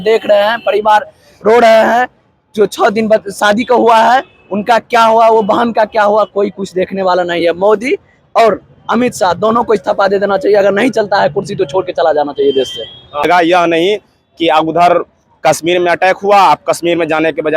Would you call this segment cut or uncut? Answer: cut